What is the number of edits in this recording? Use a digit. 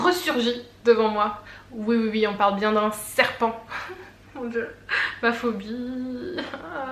0